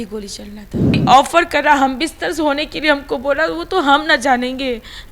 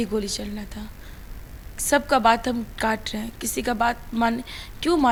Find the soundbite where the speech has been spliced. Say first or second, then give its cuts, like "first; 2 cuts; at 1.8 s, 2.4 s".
first; 1 cut; at 1.0 s